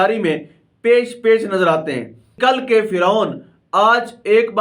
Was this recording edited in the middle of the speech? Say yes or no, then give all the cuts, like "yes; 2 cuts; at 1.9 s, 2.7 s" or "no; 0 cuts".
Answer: yes; 1 cut; at 2.3 s